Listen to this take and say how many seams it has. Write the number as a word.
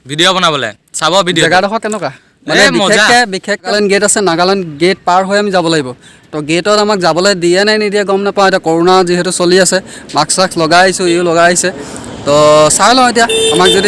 one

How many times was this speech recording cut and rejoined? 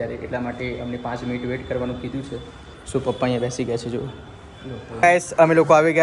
one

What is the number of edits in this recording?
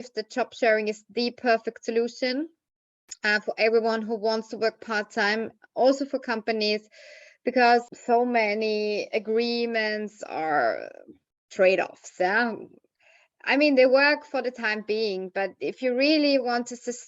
one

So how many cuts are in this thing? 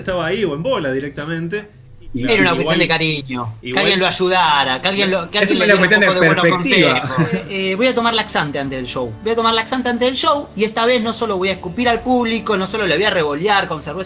two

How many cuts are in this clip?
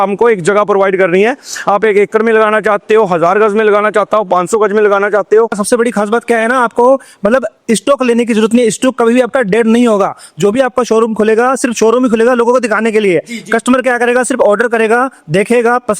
one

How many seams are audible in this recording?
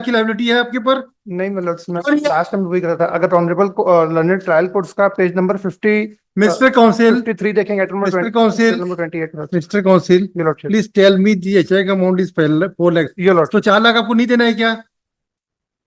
zero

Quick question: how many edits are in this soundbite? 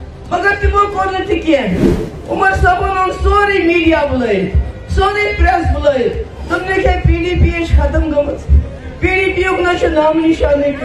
zero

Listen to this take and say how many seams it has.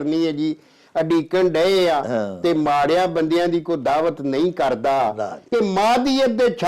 one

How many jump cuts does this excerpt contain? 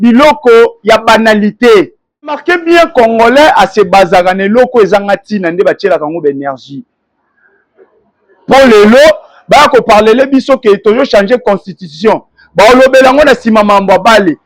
one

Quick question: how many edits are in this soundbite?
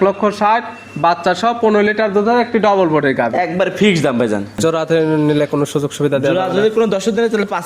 one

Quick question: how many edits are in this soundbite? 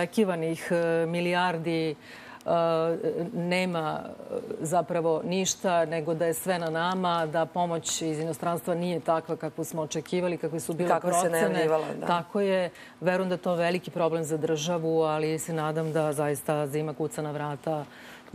one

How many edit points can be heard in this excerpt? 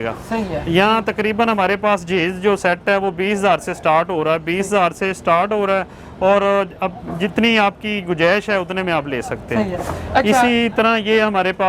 zero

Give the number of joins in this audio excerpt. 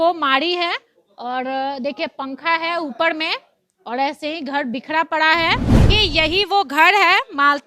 one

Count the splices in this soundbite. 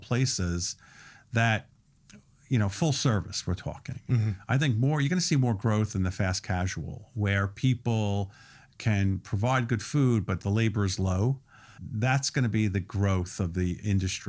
two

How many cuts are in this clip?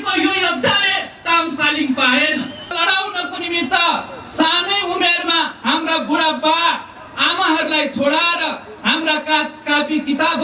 one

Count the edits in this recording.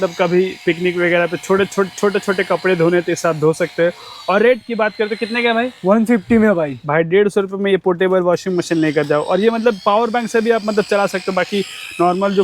zero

